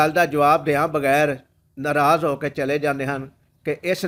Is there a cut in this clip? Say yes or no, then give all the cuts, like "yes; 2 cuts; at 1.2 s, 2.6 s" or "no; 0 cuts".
no; 0 cuts